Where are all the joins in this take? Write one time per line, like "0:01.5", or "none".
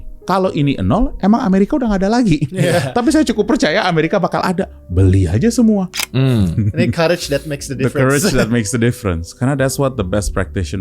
0:06.0